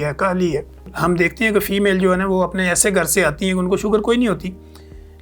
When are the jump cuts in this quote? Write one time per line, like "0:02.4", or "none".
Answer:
0:00.9